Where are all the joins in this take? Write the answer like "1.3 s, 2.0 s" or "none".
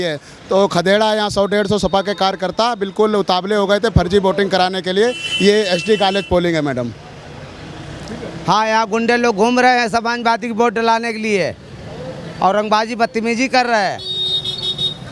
none